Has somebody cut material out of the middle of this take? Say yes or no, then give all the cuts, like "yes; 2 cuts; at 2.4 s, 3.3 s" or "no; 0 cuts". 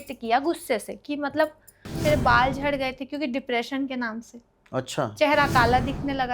yes; 1 cut; at 2.0 s